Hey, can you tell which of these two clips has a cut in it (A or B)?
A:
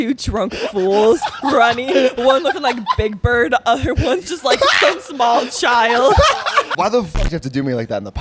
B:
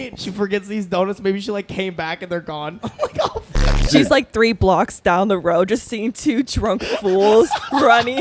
A